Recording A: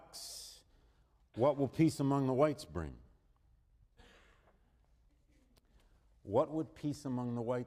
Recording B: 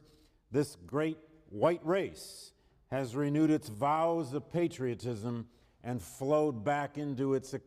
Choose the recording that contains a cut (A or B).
B